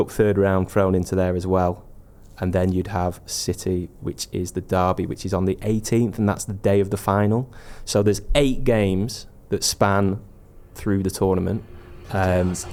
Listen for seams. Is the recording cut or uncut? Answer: uncut